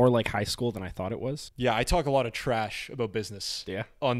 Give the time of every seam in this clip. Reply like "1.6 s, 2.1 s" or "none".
1.5 s